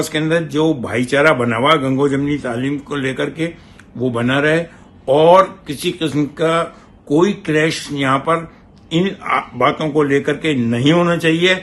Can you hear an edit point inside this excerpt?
no; 0 cuts

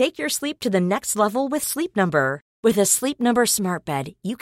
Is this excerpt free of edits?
yes; 0 cuts

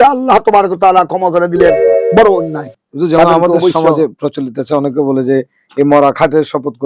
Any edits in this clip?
yes; 1 cut; at 1.9 s

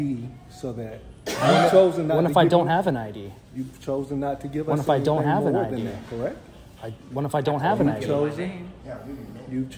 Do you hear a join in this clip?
no; 0 cuts

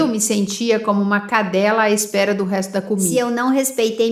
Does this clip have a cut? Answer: yes; 1 cut; at 3.1 s

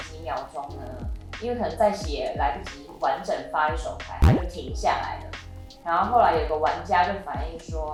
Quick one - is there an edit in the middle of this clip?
no; 0 cuts

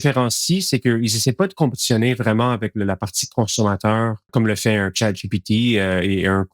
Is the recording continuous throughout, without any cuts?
no; 1 cut; at 4.3 s

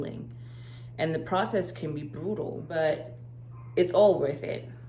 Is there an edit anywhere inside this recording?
yes; 1 cut; at 2.6 s

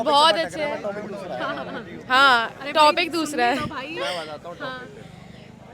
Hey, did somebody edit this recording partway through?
no; 0 cuts

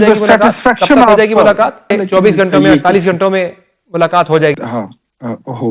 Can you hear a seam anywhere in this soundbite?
yes; 2 cuts; at 1.9 s, 4.5 s

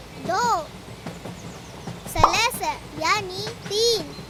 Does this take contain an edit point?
no; 0 cuts

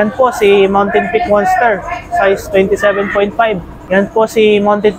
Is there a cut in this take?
yes; 1 cut; at 3.7 s

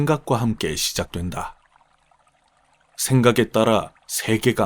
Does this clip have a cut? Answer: yes; 2 cuts; at 1.6 s, 3.0 s

